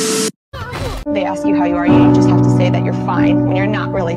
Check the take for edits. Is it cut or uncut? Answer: cut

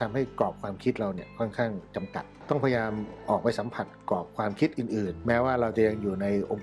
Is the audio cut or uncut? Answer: cut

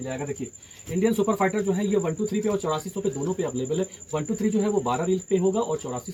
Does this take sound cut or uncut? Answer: uncut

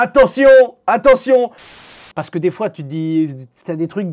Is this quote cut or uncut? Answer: cut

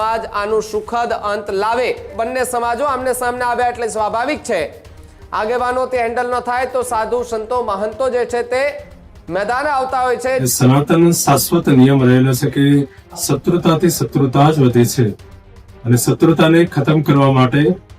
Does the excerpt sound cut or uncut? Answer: cut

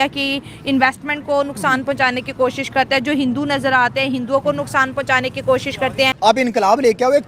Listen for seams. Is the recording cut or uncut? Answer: cut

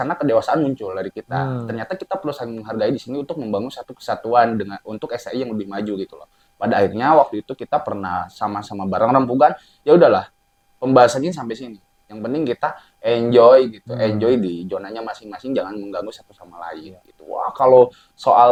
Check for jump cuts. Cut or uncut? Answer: uncut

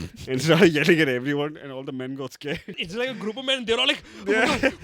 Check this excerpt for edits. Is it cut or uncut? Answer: cut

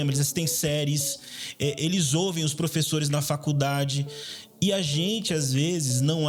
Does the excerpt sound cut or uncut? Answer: uncut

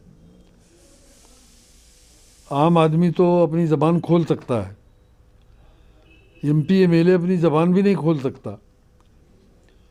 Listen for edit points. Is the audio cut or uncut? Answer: uncut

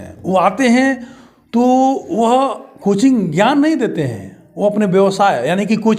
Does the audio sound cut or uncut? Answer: uncut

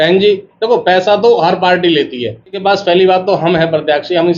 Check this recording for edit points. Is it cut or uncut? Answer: cut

